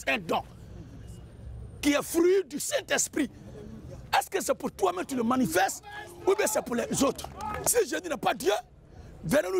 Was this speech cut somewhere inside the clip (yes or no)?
yes